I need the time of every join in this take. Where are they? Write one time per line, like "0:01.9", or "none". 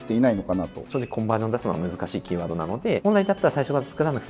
0:00.9
0:03.0